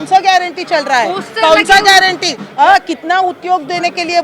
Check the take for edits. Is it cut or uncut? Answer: cut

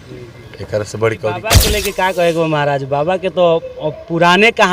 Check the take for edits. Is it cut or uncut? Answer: cut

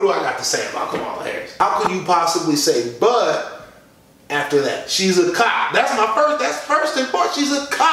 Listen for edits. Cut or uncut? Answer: cut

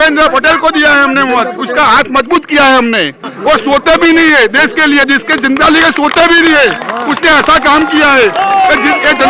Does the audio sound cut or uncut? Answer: cut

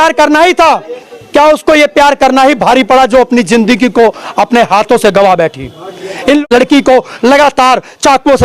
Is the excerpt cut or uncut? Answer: cut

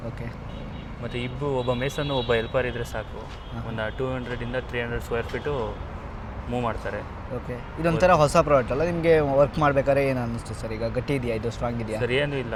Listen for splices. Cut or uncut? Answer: uncut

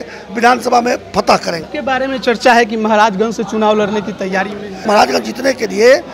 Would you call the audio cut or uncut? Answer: cut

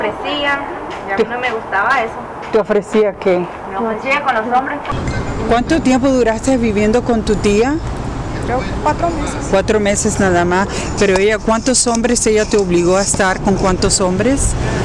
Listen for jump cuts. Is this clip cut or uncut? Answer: uncut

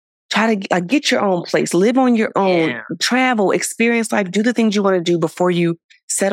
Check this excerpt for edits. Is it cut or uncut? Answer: uncut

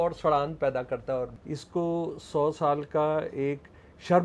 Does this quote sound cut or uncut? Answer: cut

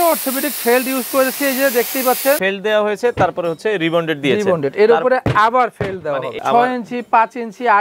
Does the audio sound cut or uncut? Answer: cut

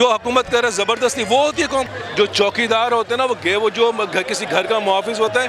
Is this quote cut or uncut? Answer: cut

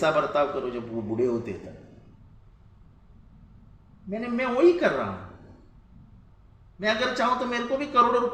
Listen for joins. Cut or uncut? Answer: uncut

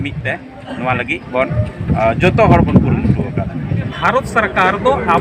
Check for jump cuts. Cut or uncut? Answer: cut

